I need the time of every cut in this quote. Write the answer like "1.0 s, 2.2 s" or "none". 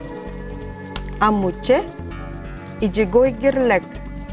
1.2 s